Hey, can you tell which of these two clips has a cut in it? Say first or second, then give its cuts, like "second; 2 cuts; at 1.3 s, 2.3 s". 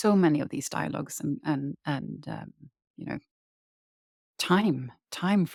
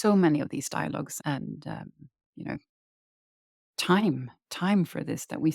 second; 1 cut; at 1.2 s